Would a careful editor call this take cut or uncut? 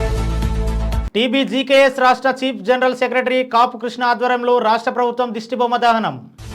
uncut